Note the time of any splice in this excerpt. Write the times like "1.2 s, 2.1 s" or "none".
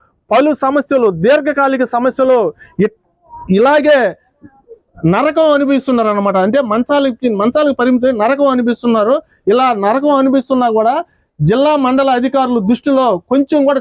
none